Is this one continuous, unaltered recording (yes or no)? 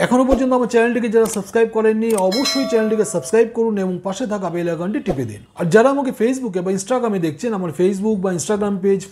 yes